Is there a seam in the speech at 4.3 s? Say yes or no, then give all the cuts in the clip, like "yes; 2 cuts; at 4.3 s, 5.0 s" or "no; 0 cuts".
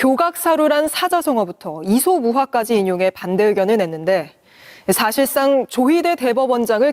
no; 0 cuts